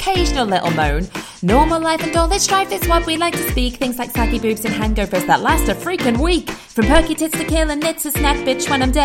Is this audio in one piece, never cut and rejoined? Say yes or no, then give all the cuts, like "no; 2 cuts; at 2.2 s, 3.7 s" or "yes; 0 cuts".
yes; 0 cuts